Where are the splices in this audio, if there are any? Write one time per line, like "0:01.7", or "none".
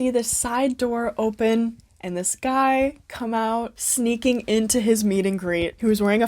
0:03.7